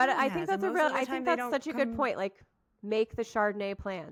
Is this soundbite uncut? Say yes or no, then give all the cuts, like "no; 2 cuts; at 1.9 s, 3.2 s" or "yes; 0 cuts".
yes; 0 cuts